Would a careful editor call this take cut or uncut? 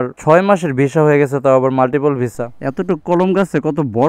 cut